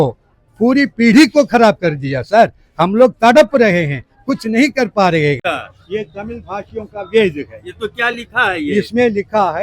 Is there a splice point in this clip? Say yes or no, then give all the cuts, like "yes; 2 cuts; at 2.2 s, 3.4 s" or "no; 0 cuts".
yes; 1 cut; at 5.5 s